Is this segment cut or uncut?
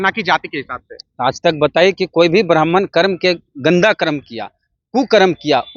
uncut